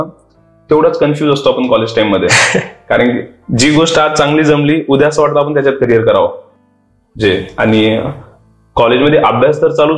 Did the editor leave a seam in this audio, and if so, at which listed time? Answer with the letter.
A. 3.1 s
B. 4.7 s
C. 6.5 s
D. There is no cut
D